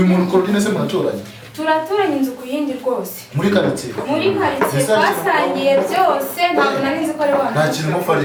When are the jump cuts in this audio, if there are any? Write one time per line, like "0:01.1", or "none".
none